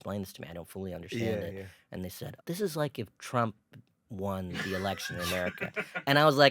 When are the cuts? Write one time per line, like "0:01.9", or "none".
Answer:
0:02.2

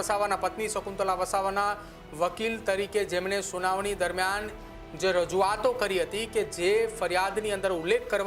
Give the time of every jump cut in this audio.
none

